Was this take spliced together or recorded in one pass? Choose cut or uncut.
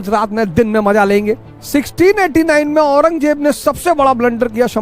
cut